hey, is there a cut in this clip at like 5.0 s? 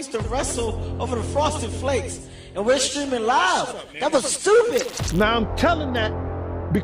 yes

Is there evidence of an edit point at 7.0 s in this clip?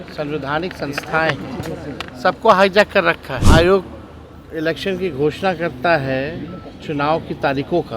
no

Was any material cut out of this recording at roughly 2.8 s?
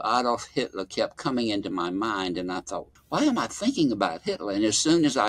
yes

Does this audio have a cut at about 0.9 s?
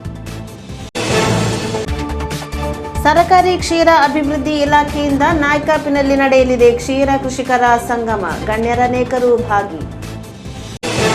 yes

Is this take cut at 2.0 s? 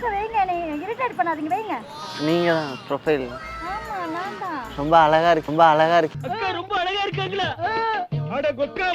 yes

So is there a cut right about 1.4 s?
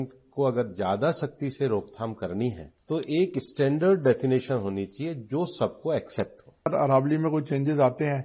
no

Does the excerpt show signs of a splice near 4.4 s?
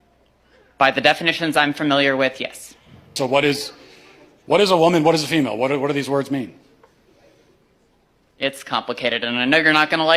no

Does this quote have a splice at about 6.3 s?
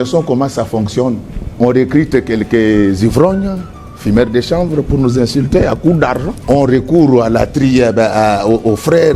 yes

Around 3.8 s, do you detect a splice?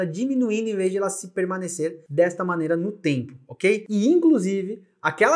yes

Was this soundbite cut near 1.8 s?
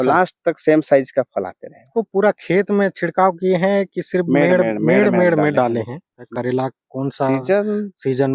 yes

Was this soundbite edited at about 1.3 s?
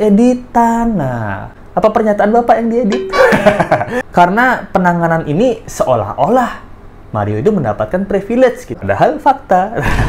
no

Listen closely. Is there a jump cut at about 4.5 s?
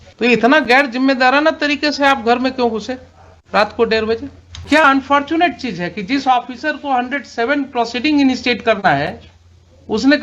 yes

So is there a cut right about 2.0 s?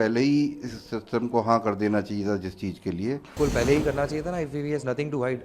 no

